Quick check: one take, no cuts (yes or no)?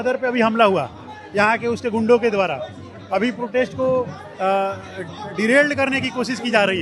yes